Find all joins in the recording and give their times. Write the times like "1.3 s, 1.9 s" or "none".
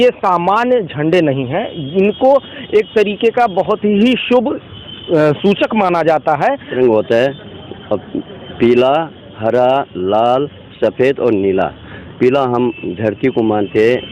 6.7 s